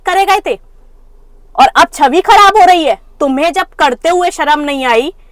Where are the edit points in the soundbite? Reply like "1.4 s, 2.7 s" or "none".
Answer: none

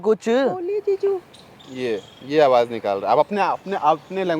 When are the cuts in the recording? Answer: none

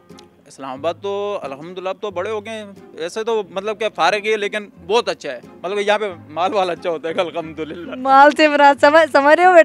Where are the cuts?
none

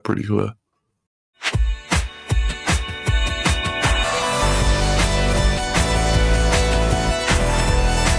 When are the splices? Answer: 1.5 s

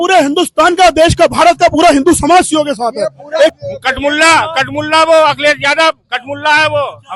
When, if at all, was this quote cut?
3.6 s

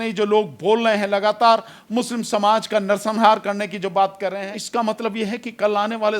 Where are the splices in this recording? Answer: 4.5 s

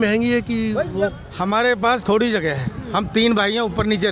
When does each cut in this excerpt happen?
1.2 s, 2.0 s

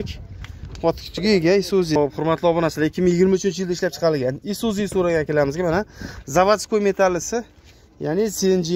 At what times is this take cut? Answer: 2.0 s

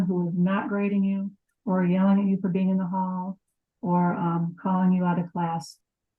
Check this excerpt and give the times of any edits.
none

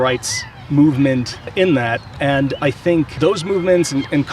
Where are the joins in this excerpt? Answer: 1.5 s, 2.1 s, 3.2 s

